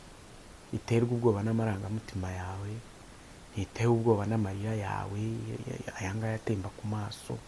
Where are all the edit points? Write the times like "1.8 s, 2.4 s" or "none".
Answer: none

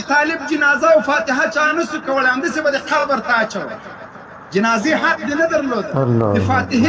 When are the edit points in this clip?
none

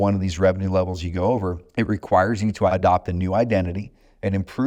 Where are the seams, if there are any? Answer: 1.6 s, 2.7 s

